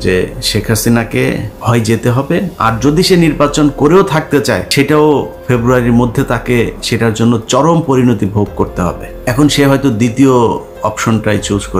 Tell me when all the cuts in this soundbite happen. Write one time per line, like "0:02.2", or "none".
0:01.5
0:04.7
0:09.1